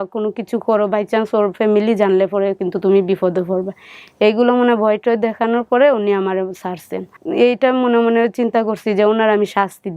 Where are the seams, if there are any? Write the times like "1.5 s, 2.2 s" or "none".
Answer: 7.2 s